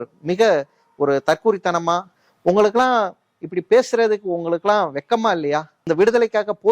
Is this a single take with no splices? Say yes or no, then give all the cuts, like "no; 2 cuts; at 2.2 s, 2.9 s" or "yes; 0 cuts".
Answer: no; 2 cuts; at 2.2 s, 5.7 s